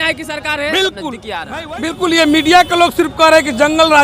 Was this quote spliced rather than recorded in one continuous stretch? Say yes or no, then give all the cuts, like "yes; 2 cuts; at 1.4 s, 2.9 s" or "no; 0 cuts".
yes; 1 cut; at 1.5 s